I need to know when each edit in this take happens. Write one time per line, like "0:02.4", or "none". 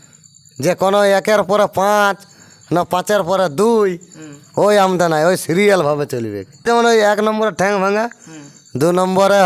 0:06.6